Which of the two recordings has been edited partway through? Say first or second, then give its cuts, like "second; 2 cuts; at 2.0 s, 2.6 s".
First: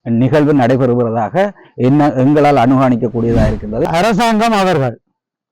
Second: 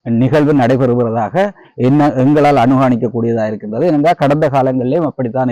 first; 1 cut; at 3.9 s